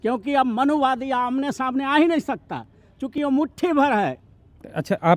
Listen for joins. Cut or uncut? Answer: cut